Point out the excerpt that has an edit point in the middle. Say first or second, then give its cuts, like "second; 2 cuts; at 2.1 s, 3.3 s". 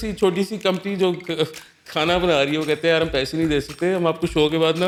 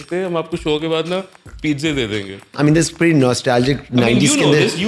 second; 1 cut; at 2.5 s